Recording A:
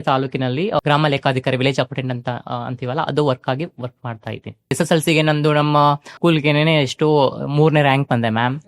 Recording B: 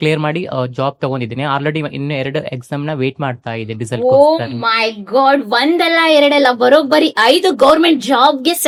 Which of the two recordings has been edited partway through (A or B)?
A